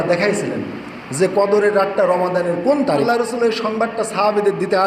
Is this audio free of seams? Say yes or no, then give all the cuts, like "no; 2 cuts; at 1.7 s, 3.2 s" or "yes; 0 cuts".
no; 1 cut; at 3.0 s